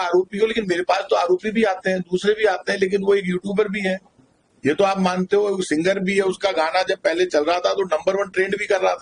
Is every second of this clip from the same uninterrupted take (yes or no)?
yes